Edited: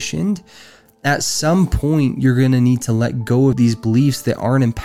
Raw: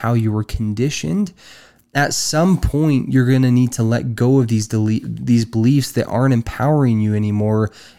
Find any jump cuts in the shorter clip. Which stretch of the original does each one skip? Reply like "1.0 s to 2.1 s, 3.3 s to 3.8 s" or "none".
4.5 s to 5.3 s